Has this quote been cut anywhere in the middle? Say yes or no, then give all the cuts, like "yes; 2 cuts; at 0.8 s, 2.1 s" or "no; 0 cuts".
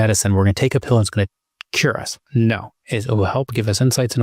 yes; 1 cut; at 2.7 s